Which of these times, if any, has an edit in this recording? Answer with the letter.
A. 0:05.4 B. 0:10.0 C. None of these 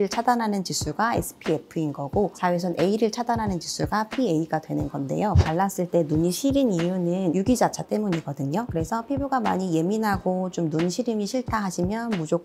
A